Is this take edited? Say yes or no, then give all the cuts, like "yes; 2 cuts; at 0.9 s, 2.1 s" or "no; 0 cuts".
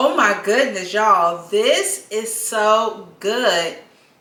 no; 0 cuts